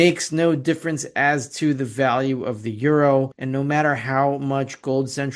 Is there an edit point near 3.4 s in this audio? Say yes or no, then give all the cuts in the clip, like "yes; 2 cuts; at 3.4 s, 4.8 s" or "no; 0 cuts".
yes; 1 cut; at 3.4 s